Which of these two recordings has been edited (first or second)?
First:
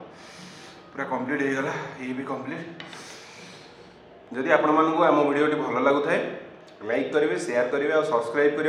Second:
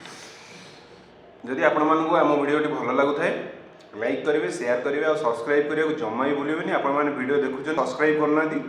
second